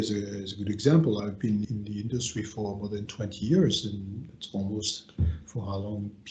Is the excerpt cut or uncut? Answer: cut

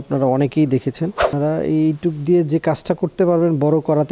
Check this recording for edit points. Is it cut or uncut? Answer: cut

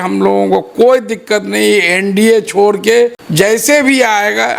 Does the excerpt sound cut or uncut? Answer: cut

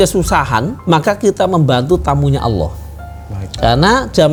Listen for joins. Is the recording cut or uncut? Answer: uncut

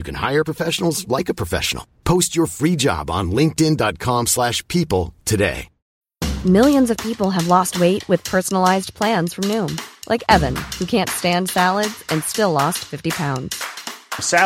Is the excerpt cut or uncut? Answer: uncut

